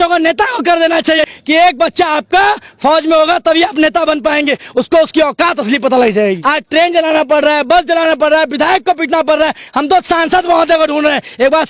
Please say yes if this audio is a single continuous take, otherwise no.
no